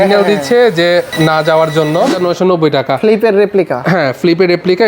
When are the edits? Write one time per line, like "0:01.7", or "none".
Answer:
0:01.1
0:02.2